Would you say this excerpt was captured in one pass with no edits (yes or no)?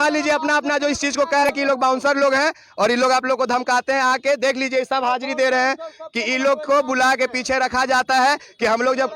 no